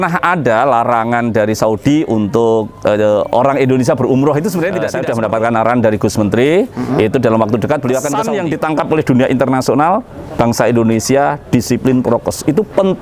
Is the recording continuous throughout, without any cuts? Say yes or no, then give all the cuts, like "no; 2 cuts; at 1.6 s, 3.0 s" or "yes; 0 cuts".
no; 2 cuts; at 4.9 s, 8.3 s